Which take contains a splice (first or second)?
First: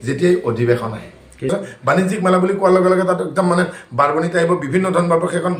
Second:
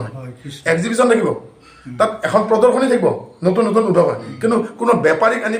first